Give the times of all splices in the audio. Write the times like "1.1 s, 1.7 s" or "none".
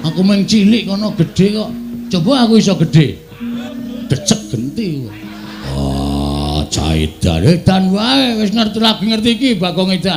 3.7 s, 5.7 s